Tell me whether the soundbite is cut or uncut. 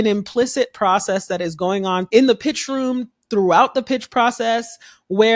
cut